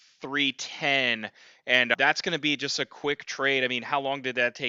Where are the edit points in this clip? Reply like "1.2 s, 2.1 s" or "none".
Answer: none

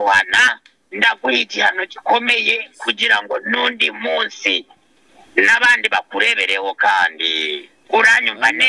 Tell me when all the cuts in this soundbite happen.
none

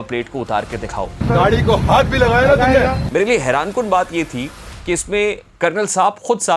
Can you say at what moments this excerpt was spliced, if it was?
none

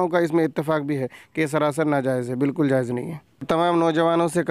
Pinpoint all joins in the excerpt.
3.5 s

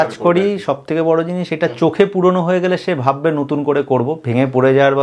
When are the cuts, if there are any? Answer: none

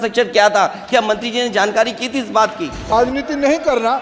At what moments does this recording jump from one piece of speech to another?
2.9 s

